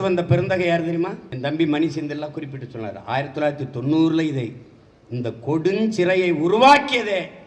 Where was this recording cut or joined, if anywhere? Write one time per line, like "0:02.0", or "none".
0:01.3